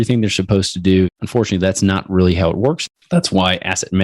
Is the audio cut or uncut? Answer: cut